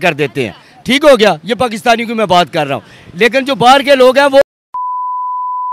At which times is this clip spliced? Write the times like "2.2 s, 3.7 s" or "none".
none